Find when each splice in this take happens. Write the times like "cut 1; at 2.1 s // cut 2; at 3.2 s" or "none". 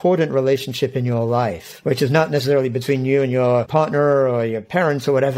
cut 1; at 1.7 s